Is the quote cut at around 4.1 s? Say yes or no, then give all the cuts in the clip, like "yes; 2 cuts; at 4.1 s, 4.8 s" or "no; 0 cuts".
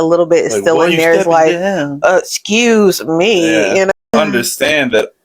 yes; 1 cut; at 4.1 s